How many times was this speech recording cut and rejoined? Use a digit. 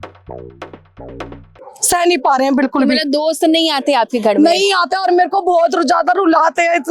0